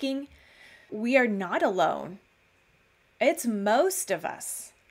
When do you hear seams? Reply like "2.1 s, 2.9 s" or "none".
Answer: 0.9 s